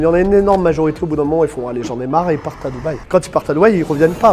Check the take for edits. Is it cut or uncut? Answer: uncut